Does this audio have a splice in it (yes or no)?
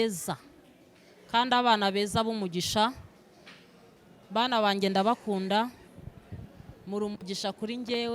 no